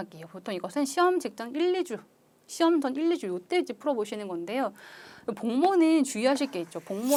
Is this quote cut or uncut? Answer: uncut